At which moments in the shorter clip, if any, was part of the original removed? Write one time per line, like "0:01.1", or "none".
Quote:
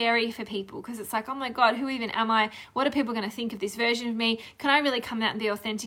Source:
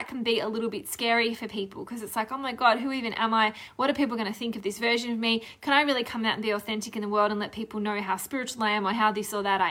none